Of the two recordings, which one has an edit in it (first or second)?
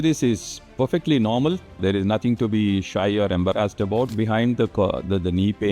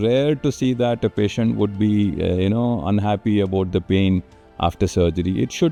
first